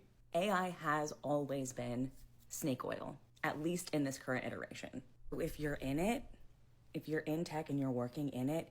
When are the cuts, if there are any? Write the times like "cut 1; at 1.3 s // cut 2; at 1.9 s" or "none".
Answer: cut 1; at 5.5 s

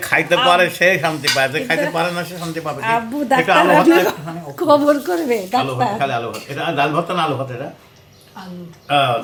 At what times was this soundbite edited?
none

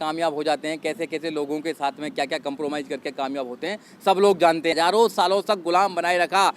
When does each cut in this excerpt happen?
cut 1; at 4.7 s

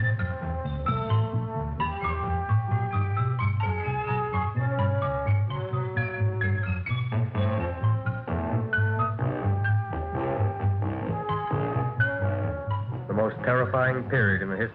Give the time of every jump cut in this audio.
none

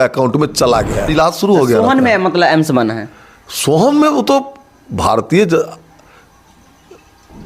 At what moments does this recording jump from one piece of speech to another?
cut 1; at 1.1 s

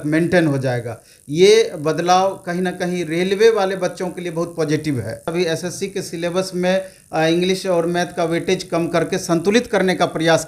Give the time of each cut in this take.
cut 1; at 5.3 s

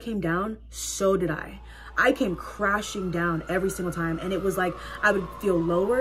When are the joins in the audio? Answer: none

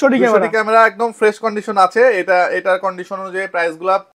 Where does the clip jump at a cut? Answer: none

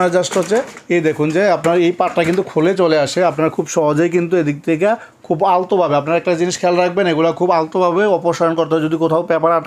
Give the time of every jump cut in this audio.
none

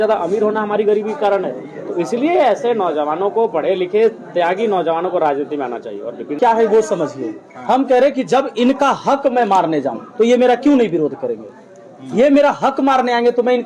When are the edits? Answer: cut 1; at 6.4 s

